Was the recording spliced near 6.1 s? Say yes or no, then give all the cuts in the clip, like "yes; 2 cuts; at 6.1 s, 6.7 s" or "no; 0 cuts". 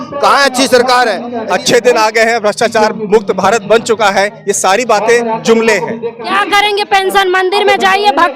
yes; 2 cuts; at 1.3 s, 6.1 s